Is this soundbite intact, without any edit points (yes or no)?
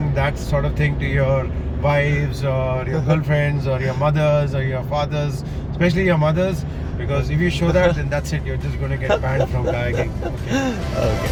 yes